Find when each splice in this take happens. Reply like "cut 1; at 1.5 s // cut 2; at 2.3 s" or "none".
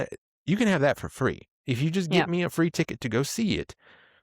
cut 1; at 1.5 s